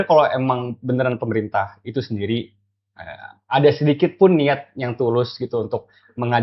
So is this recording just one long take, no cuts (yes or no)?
yes